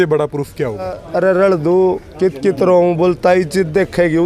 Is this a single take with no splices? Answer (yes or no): no